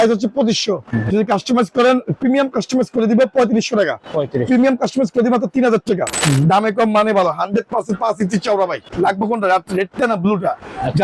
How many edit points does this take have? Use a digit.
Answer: 3